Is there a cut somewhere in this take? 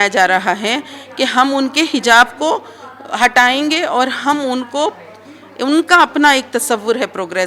no; 0 cuts

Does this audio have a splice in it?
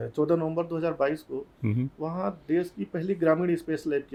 no; 0 cuts

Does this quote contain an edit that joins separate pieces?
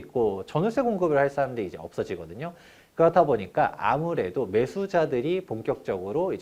no; 0 cuts

